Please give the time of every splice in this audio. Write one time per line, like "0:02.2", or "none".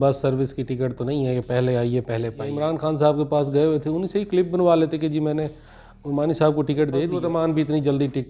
0:02.4
0:07.2